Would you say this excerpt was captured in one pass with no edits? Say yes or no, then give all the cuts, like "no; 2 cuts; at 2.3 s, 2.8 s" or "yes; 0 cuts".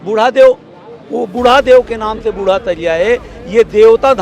yes; 0 cuts